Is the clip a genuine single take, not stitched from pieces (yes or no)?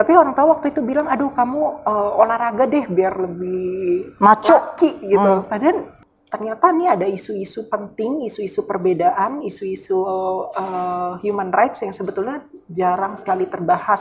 no